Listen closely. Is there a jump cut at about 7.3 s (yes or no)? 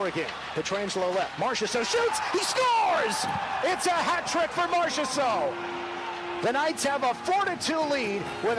no